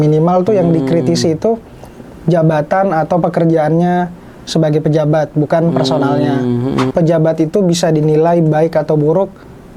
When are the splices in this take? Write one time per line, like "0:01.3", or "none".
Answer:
0:06.9